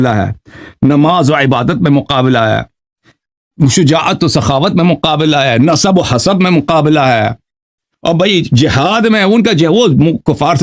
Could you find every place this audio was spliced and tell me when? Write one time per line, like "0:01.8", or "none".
none